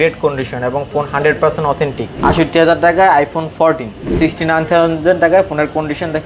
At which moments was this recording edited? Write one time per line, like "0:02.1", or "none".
0:02.1
0:04.0